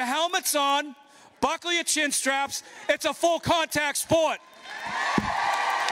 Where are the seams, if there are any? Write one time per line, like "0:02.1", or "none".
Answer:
none